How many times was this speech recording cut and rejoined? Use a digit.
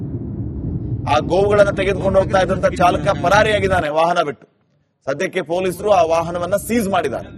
0